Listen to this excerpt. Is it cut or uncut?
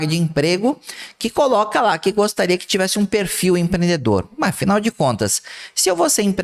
uncut